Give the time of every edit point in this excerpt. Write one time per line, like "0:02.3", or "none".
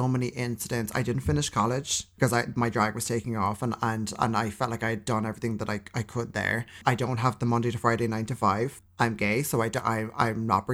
0:02.0
0:06.8
0:08.8